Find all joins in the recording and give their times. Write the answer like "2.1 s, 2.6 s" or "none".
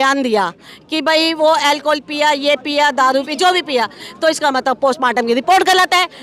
none